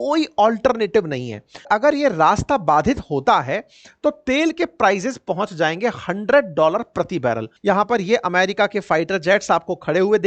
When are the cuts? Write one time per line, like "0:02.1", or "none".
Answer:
0:01.7
0:07.5